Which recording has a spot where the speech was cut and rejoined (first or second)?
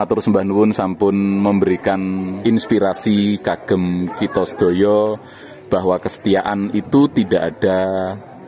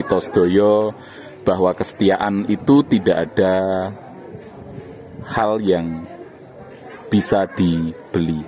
first